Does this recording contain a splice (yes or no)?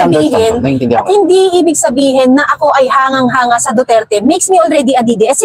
no